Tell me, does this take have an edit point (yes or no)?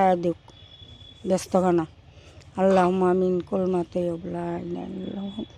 no